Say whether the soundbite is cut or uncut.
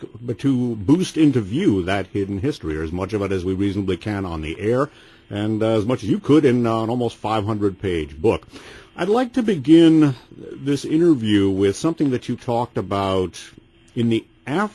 uncut